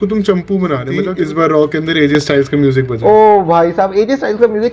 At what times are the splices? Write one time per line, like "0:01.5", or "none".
0:01.1